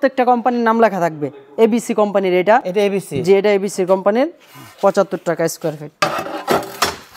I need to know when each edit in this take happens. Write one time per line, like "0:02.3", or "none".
none